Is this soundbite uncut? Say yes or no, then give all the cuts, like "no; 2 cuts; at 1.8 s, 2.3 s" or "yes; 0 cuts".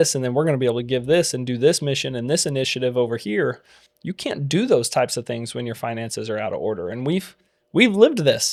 yes; 0 cuts